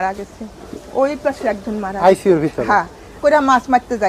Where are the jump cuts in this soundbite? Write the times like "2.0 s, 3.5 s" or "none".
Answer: 3.2 s